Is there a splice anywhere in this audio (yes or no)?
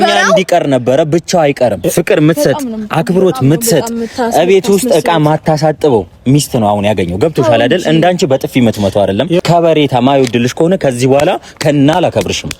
yes